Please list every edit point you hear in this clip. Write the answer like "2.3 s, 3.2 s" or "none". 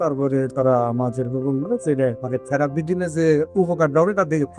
2.2 s